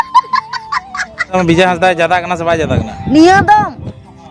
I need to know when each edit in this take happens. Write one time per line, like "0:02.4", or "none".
0:01.3